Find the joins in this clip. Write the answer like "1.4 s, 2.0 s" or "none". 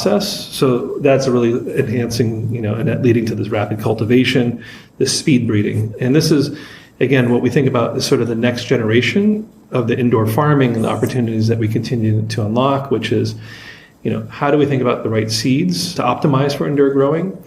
15.9 s